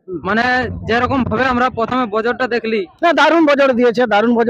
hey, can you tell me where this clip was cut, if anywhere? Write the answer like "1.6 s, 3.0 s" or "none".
none

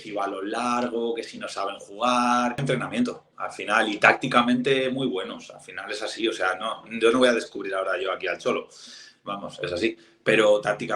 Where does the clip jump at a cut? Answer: 2.6 s

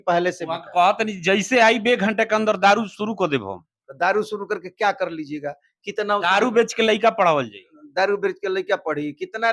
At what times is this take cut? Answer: none

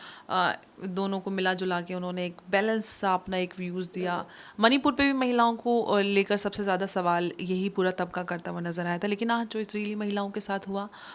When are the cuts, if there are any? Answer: 4.5 s

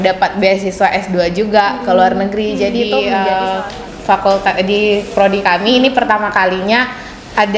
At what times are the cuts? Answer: 3.0 s

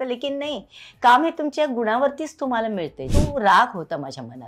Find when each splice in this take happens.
3.0 s

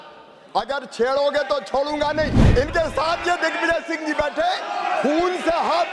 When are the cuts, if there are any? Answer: 2.4 s

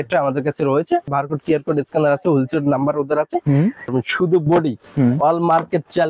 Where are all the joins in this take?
1.1 s, 3.9 s

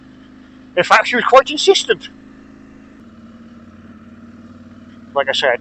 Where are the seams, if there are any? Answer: 3.0 s

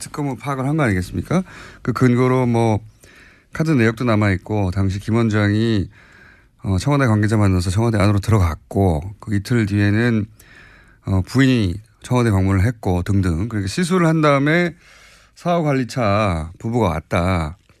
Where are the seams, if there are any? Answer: 11.5 s

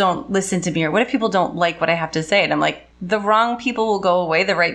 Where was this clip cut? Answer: 2.9 s

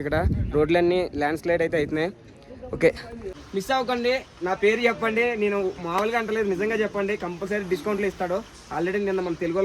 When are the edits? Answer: 3.3 s

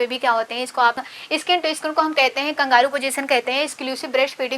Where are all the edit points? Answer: 1.0 s

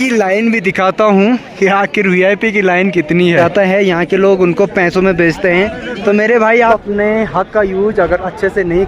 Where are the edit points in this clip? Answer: 3.4 s, 6.7 s

